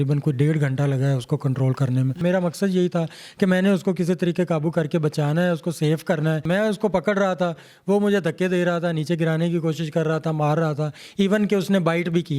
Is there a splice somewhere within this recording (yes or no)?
yes